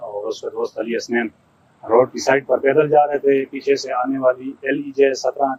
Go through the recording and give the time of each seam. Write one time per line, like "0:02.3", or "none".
none